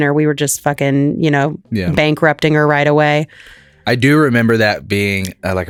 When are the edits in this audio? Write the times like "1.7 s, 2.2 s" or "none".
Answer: none